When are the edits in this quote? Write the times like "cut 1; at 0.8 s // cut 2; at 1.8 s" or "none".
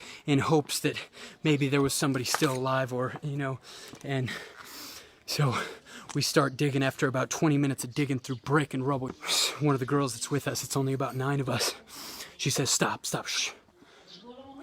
cut 1; at 9.2 s